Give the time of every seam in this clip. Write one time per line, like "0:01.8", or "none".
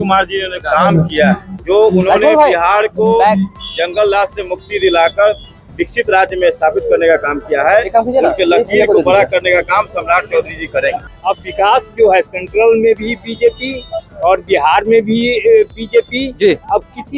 0:01.5
0:11.1